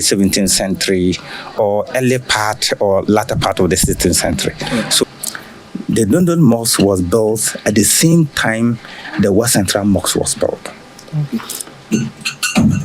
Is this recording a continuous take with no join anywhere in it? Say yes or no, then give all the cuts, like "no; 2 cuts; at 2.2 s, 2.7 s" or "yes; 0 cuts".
no; 1 cut; at 4.9 s